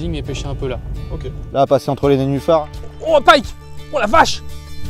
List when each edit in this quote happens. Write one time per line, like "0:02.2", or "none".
0:00.9